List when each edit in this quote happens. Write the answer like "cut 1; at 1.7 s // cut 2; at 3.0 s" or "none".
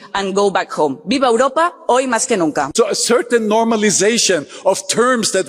cut 1; at 1.0 s // cut 2; at 2.6 s